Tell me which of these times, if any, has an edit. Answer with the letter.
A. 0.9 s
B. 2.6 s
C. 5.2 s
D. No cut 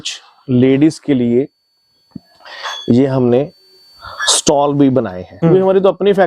C